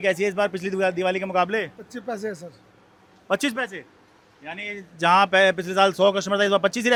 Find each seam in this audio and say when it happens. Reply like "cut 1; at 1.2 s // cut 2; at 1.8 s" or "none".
none